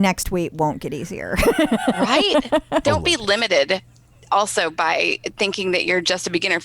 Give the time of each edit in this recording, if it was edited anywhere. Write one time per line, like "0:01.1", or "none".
0:02.8